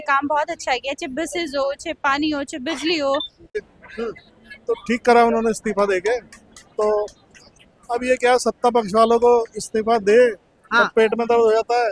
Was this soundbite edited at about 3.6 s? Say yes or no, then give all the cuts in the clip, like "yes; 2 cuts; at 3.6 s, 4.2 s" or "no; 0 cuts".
yes; 1 cut; at 3.6 s